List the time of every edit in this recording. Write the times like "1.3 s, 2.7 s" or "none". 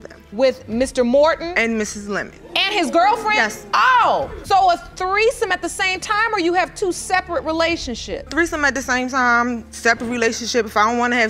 3.6 s, 8.3 s